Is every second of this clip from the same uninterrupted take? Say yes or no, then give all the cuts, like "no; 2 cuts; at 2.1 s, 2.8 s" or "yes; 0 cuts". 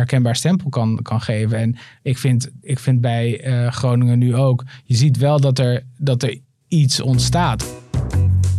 no; 1 cut; at 7.6 s